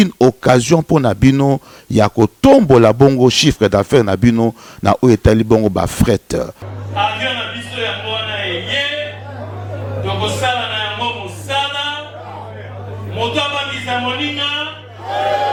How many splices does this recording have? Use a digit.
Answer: 0